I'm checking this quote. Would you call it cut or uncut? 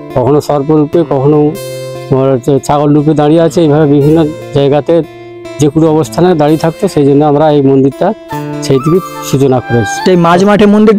cut